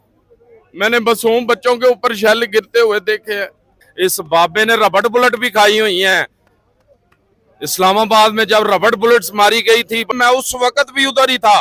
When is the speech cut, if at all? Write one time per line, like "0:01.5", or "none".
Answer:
0:03.8
0:10.1